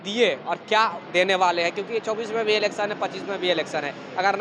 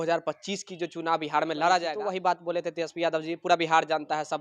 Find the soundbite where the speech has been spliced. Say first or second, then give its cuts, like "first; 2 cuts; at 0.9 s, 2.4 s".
second; 1 cut; at 2.0 s